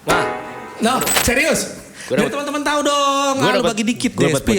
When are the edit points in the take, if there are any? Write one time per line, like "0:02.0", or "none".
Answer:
0:01.2